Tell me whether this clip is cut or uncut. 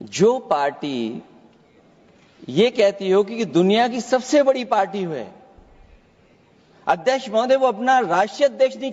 uncut